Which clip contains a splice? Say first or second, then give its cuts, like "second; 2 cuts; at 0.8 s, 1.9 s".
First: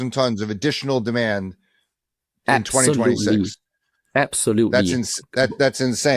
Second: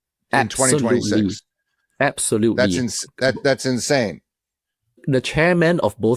second; 1 cut; at 5.0 s